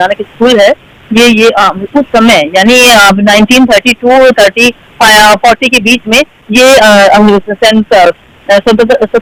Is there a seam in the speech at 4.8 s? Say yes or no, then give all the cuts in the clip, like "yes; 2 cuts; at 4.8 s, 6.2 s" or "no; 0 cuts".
no; 0 cuts